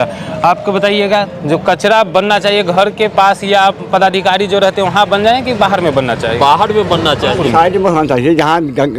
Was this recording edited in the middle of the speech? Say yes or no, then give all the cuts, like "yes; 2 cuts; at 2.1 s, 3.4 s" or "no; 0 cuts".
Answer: yes; 1 cut; at 7.4 s